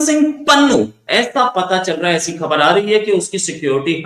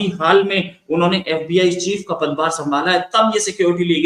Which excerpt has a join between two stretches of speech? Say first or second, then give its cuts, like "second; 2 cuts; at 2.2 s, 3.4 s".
first; 1 cut; at 1.0 s